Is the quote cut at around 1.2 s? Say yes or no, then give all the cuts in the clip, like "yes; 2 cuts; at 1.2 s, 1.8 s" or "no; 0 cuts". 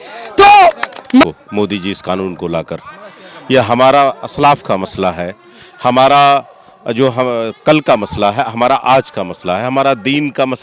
yes; 1 cut; at 1.2 s